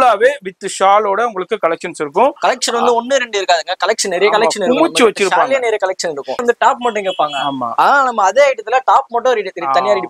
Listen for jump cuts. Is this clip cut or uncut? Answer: cut